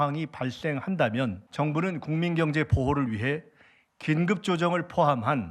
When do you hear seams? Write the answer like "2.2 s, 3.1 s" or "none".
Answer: 1.4 s